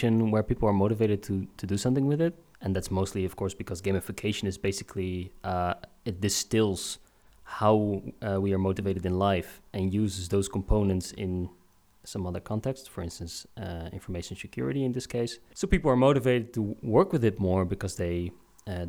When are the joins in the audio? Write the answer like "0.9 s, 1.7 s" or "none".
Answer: 2.5 s, 15.4 s